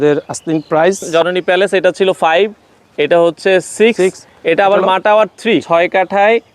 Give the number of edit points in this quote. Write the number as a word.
two